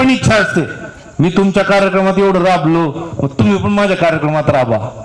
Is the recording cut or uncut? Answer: uncut